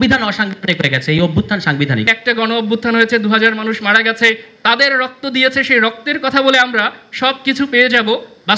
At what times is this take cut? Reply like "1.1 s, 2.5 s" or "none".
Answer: 2.1 s